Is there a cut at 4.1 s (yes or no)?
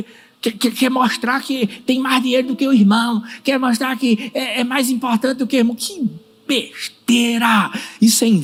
no